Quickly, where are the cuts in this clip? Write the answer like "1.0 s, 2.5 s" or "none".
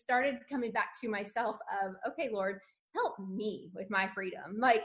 none